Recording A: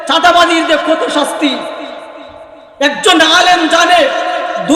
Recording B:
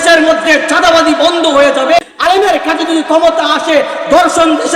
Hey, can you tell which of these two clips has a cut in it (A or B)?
B